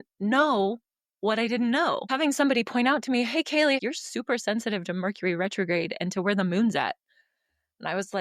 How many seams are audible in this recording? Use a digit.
2